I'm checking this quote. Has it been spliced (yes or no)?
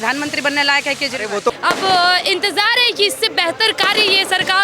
yes